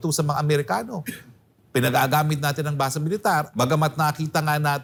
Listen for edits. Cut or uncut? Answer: uncut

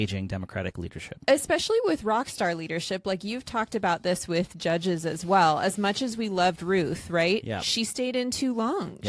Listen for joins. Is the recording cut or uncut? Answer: uncut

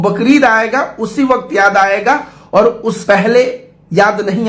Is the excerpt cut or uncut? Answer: cut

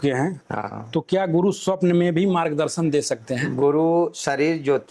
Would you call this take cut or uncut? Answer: uncut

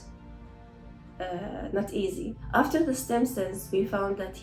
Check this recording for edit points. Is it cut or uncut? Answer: cut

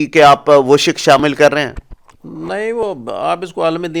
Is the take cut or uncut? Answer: uncut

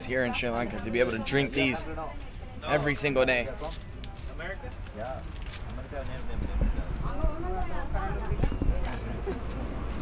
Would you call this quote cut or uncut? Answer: uncut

